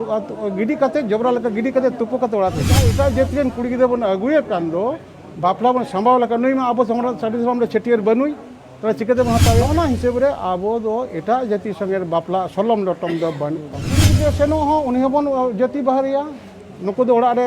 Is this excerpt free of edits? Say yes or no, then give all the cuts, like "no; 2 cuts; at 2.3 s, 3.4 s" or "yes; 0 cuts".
no; 3 cuts; at 2.9 s, 9.7 s, 14.1 s